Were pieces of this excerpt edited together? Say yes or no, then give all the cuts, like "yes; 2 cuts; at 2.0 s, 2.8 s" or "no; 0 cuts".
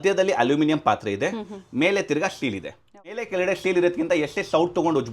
yes; 1 cut; at 3.2 s